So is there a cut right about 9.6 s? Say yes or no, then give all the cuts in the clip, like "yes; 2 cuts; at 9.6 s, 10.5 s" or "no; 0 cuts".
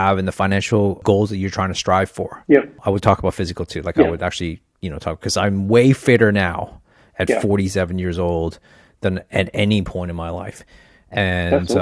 no; 2 cuts; at 1.0 s, 2.7 s